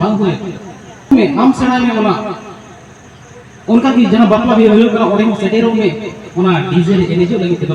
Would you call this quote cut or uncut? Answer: cut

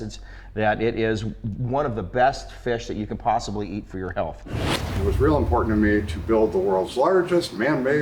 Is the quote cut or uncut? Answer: cut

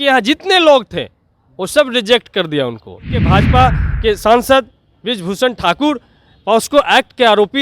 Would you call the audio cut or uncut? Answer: cut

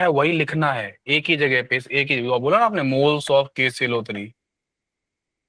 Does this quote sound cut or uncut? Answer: uncut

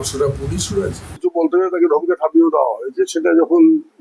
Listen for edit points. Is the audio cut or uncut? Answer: cut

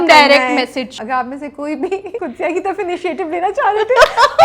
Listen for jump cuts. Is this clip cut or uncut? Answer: cut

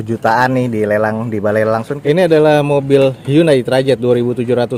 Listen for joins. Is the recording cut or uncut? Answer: cut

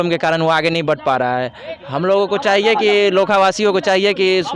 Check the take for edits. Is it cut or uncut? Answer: uncut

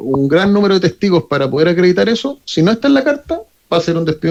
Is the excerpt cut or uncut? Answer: uncut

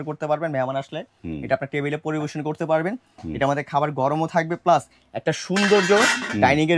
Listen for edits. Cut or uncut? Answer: uncut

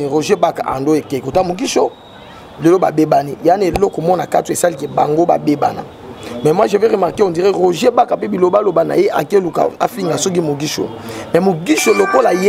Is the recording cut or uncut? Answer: uncut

